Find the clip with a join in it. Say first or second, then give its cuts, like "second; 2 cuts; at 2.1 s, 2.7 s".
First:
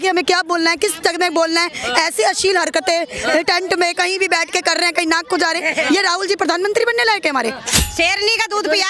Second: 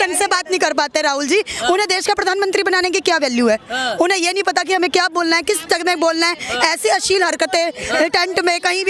first; 1 cut; at 7.8 s